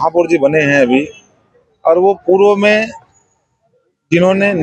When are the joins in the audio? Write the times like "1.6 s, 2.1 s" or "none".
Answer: none

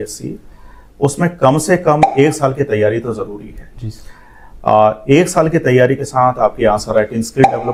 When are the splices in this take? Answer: none

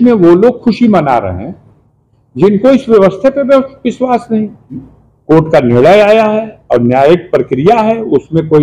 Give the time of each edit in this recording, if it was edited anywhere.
4.9 s

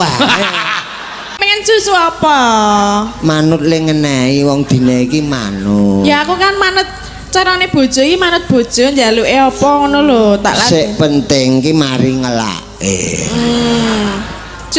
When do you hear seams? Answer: 1.4 s

